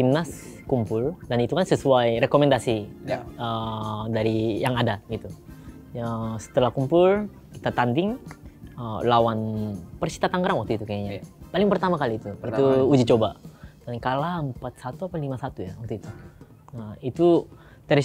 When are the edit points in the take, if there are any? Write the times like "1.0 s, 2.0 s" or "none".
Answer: none